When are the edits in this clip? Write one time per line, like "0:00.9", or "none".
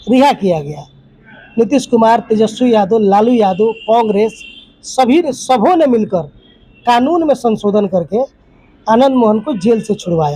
none